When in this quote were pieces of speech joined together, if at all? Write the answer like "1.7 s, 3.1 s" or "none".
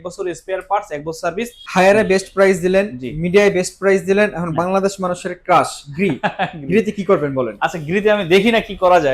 1.6 s